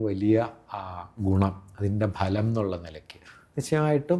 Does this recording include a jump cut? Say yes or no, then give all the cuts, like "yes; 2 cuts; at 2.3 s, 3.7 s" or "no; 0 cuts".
no; 0 cuts